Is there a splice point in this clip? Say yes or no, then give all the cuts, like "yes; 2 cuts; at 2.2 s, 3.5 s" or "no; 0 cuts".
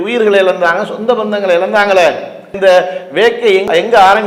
no; 0 cuts